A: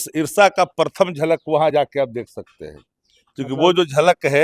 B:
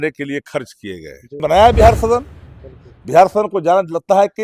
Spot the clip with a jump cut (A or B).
B